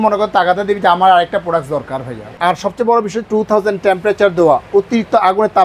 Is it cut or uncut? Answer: cut